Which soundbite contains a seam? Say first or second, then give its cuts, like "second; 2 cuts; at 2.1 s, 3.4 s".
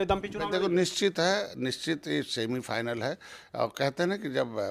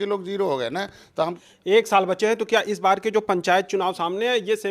second; 1 cut; at 1.4 s